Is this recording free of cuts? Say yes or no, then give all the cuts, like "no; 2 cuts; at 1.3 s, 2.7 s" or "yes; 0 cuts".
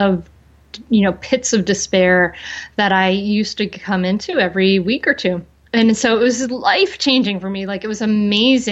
no; 1 cut; at 5.5 s